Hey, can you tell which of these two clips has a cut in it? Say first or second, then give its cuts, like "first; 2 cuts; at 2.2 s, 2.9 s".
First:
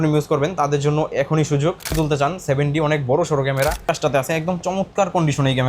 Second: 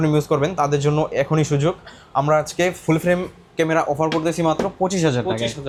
first; 2 cuts; at 1.9 s, 3.8 s